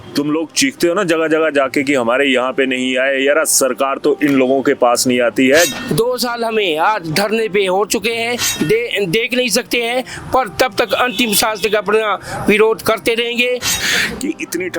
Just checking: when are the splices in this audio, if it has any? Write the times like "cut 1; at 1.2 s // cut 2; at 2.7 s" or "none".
cut 1; at 5.8 s // cut 2; at 8.5 s // cut 3; at 13.8 s